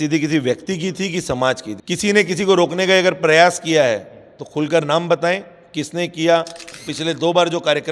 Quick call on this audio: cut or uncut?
cut